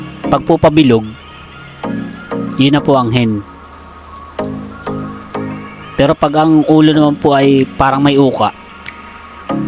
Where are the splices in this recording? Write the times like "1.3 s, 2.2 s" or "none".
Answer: 1.1 s, 2.5 s, 3.8 s, 5.7 s